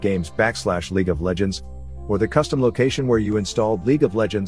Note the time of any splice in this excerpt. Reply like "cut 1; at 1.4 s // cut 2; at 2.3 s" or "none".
none